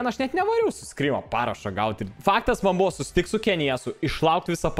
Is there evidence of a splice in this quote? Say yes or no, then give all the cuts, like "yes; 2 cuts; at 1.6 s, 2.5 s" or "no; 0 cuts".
yes; 1 cut; at 2.1 s